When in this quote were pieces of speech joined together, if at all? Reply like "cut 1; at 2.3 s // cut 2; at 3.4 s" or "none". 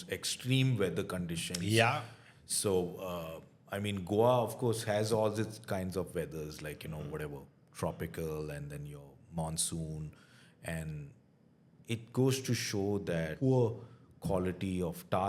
cut 1; at 13.3 s